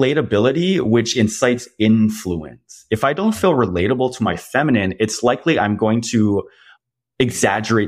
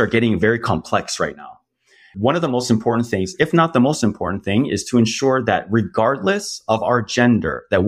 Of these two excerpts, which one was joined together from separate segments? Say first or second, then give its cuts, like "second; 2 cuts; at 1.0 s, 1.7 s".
second; 1 cut; at 2.1 s